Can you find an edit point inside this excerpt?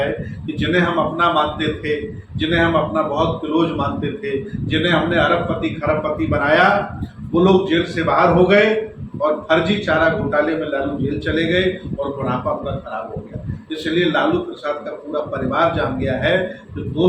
no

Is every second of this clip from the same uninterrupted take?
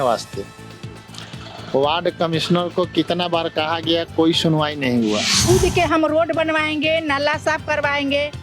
no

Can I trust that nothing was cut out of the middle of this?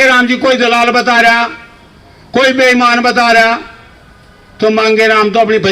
yes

